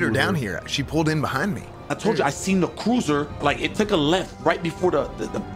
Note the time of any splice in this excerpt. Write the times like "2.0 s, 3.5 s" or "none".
1.7 s, 3.4 s